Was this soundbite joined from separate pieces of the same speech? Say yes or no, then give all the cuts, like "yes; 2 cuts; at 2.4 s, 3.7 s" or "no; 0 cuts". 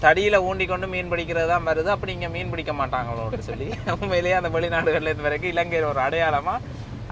no; 0 cuts